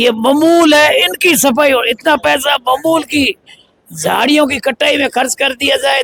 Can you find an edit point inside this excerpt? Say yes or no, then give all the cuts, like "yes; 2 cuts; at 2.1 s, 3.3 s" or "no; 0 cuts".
no; 0 cuts